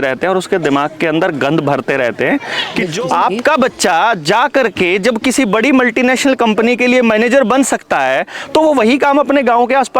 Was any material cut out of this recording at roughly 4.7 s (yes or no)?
no